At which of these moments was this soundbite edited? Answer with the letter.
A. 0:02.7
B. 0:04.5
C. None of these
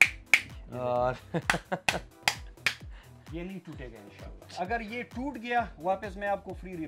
B